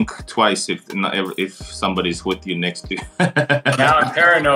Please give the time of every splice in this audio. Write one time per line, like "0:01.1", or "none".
none